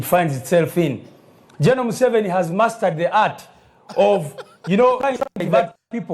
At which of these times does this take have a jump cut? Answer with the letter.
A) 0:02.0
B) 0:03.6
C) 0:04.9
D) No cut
C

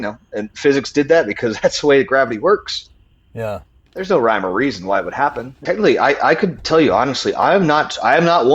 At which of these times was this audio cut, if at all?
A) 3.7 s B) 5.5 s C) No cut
B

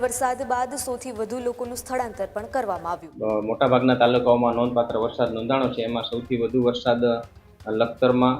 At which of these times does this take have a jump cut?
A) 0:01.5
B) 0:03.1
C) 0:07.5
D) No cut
B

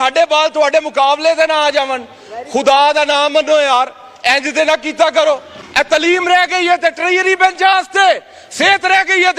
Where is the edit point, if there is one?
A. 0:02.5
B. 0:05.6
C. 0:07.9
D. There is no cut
B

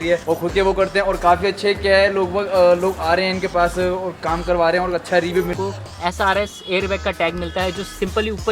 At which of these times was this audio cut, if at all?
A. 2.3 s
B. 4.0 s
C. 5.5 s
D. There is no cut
C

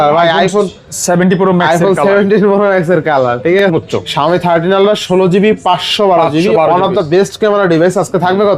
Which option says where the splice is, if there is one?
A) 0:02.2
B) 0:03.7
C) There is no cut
B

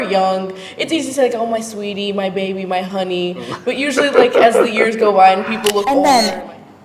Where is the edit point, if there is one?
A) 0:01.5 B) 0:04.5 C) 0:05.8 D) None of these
C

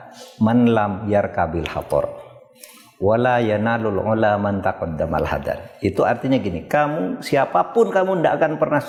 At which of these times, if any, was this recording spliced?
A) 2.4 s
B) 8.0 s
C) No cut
C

